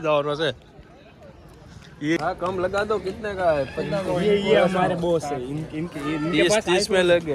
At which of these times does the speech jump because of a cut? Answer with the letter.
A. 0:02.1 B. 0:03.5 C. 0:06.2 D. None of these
A